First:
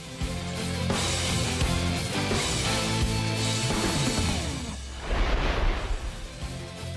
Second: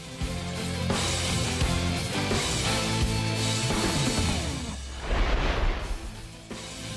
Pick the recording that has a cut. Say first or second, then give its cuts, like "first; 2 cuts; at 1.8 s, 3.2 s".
first; 1 cut; at 6.0 s